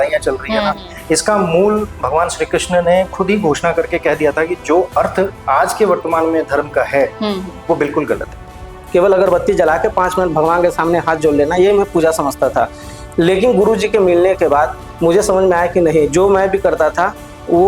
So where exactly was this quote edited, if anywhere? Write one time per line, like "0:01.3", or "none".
0:08.7